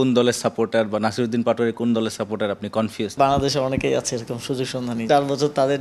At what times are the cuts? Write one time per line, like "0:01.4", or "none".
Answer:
0:03.2
0:05.0